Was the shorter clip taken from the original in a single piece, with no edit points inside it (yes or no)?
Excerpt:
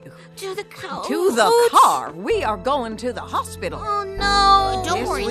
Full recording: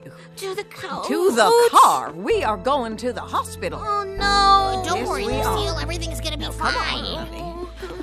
yes